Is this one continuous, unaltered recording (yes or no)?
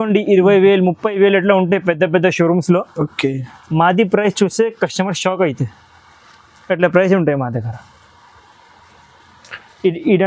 yes